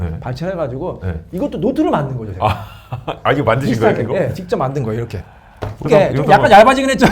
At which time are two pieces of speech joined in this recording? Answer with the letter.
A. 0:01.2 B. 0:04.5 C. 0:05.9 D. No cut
C